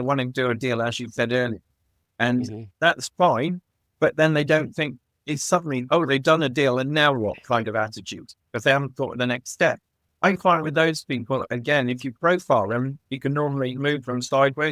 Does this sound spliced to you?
yes; 1 cut; at 10.0 s

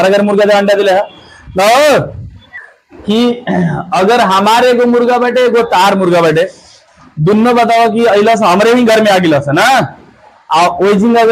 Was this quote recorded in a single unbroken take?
yes; 0 cuts

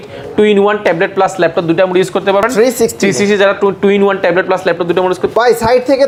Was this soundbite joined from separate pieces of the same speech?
no; 0 cuts

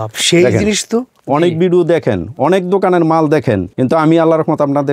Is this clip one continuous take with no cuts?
no; 2 cuts; at 1.1 s, 3.7 s

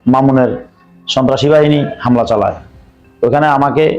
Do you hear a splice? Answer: no; 0 cuts

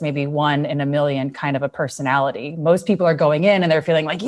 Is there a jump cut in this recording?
no; 0 cuts

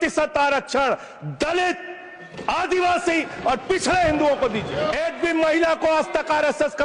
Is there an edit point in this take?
yes; 1 cut; at 4.9 s

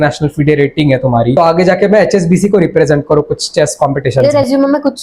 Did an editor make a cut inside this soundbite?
yes; 2 cuts; at 1.4 s, 4.2 s

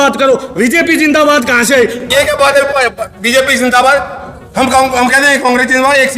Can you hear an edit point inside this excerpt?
yes; 1 cut; at 2.0 s

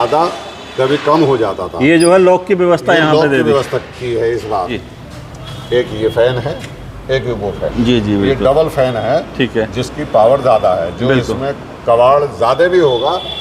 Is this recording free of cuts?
no; 1 cut; at 4.8 s

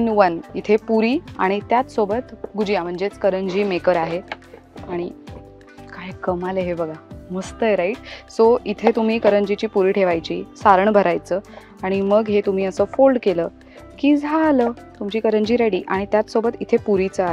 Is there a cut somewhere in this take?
no; 0 cuts

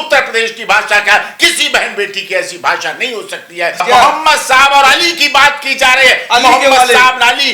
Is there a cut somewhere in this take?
yes; 1 cut; at 3.8 s

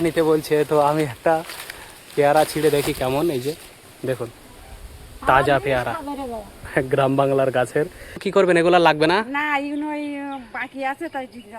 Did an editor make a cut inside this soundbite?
yes; 2 cuts; at 6.6 s, 8.3 s

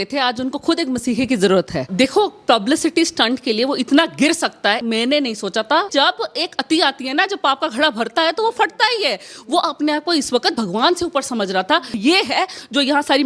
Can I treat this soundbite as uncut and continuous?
no; 4 cuts; at 1.9 s, 4.8 s, 5.9 s, 12.0 s

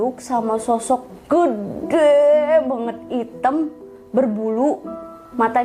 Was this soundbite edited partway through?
no; 0 cuts

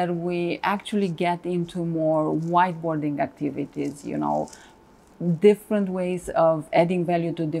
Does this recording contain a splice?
no; 0 cuts

